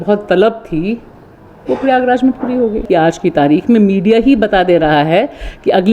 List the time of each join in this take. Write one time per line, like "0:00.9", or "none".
0:02.8